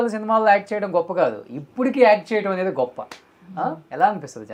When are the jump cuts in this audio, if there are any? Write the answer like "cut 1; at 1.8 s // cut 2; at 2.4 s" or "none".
none